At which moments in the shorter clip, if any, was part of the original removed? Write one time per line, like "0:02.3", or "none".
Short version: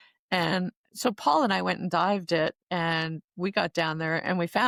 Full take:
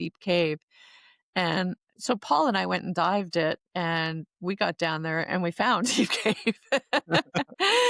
none